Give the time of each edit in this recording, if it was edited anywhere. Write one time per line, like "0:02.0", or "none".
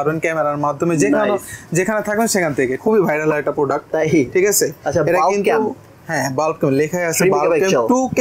0:02.8